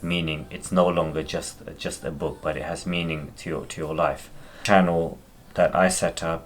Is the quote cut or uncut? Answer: cut